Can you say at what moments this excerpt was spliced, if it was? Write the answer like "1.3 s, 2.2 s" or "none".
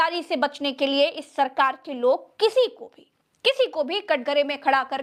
none